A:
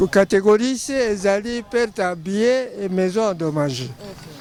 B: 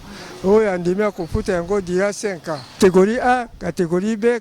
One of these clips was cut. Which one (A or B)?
B